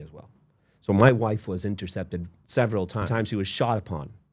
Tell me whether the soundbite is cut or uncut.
cut